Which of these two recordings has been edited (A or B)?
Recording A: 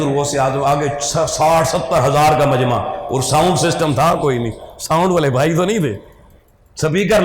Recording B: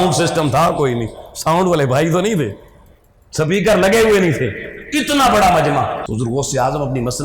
B